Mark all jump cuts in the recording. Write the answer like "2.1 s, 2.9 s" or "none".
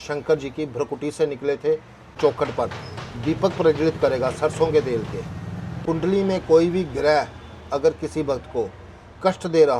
2.2 s, 5.8 s

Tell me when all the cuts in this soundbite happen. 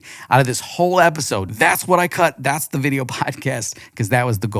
1.4 s

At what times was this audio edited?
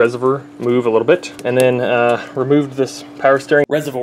1.3 s

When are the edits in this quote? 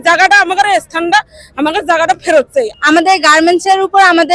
2.7 s

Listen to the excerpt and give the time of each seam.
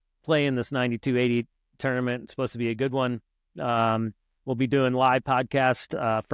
none

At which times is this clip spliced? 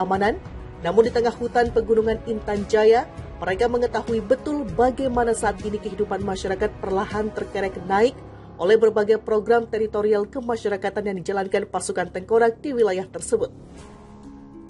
13.6 s

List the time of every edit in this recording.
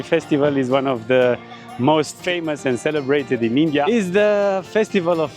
2.2 s, 3.9 s

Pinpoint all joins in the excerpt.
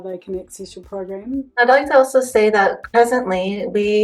1.5 s, 2.8 s

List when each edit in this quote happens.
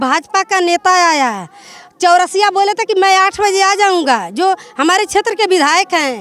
none

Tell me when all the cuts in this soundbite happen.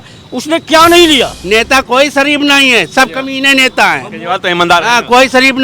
1.4 s

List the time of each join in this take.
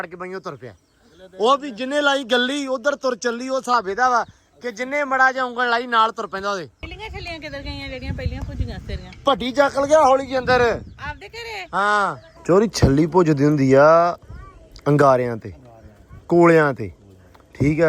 6.9 s, 12.2 s

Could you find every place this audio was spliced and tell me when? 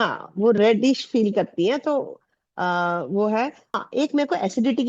3.7 s

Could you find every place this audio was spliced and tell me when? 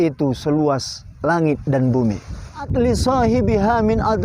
2.7 s

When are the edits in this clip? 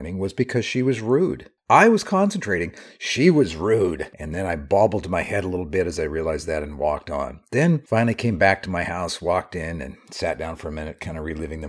none

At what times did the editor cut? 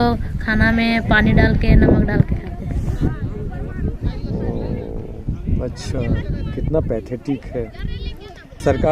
none

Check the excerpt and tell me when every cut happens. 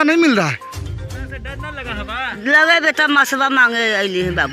1.3 s

